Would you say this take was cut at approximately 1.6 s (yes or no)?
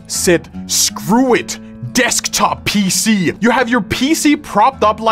no